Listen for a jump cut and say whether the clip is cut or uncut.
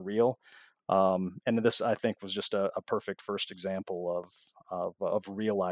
uncut